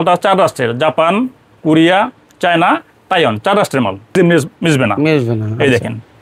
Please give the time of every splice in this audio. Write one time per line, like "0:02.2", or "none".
0:04.2